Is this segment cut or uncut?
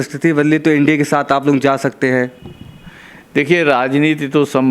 uncut